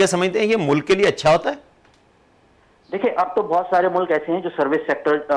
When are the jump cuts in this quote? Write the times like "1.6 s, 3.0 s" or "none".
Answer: none